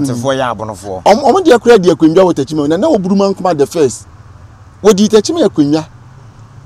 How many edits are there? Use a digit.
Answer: 0